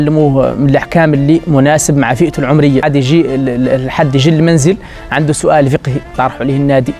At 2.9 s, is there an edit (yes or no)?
yes